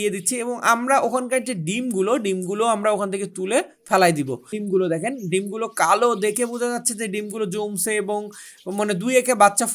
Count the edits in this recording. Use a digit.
1